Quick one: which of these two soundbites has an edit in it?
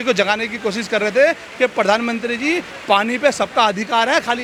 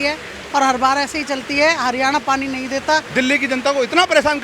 second; 1 cut; at 3.1 s

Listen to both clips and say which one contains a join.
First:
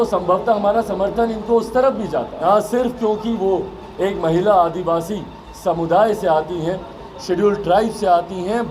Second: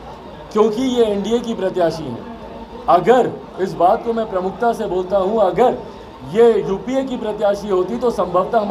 first; 1 cut; at 2.3 s

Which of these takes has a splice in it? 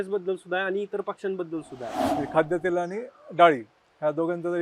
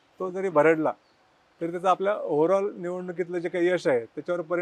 first; 1 cut; at 2.0 s

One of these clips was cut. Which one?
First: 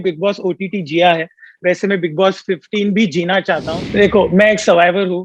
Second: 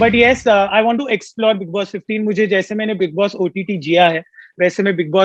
first; 1 cut; at 3.8 s

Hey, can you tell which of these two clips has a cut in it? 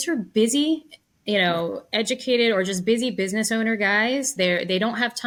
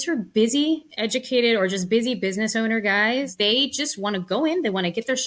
second; 2 cuts; at 0.9 s, 3.3 s

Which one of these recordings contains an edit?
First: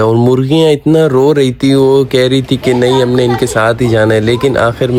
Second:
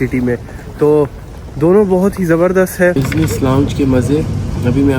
second; 1 cut; at 2.9 s

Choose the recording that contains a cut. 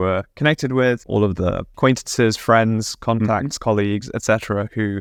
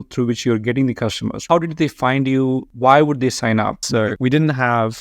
second; 3 cuts; at 1.4 s, 2.7 s, 4.1 s

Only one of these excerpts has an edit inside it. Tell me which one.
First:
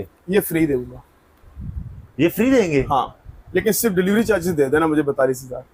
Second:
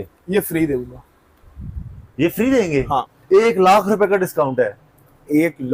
second; 1 cut; at 3.1 s

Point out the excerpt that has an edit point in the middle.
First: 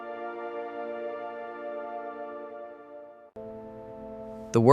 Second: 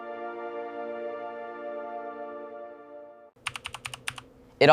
first; 1 cut; at 3.3 s

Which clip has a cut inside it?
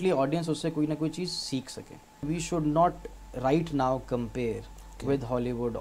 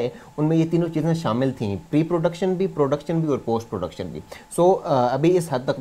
first; 1 cut; at 2.3 s

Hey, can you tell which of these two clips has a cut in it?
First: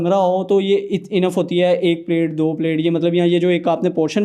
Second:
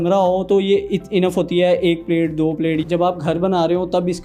second; 1 cut; at 2.8 s

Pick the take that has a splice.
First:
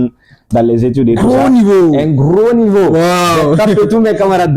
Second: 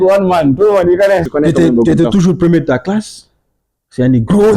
second; 1 cut; at 1.3 s

